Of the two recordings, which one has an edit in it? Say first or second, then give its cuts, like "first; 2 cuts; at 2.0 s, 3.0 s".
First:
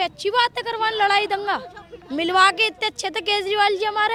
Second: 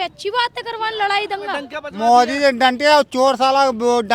second; 1 cut; at 1.8 s